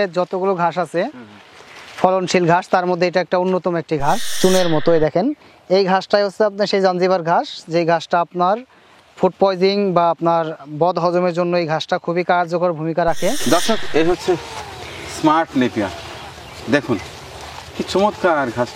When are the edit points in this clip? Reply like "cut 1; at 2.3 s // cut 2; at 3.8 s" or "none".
cut 1; at 4.3 s // cut 2; at 13.4 s